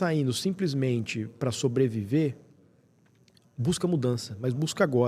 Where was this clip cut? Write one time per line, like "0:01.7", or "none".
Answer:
none